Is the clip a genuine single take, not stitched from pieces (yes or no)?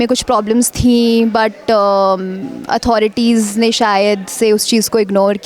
yes